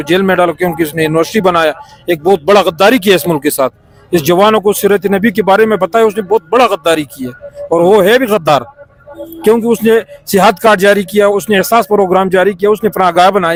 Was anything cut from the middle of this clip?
no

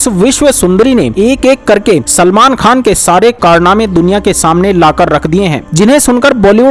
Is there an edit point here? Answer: no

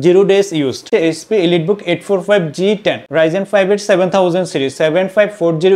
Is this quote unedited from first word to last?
no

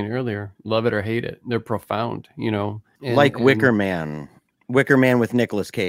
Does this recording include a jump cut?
yes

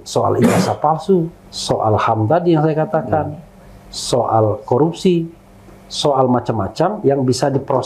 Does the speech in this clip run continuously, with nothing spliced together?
yes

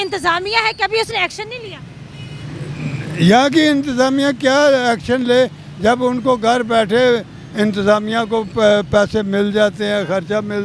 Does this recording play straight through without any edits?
yes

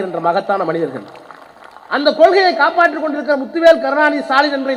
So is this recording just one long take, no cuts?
yes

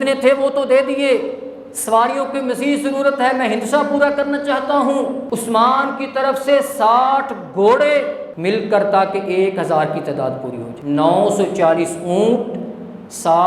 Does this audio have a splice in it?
yes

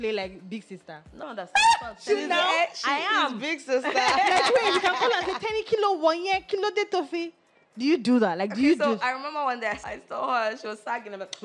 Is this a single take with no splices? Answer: no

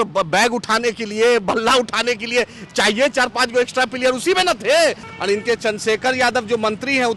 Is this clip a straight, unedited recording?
no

